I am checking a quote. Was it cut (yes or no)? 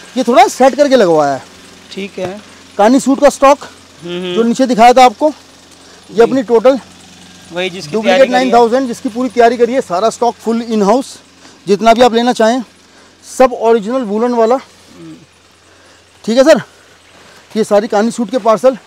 no